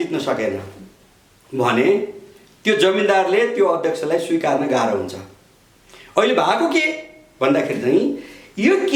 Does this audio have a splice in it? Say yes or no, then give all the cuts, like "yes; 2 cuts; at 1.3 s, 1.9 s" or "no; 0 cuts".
no; 0 cuts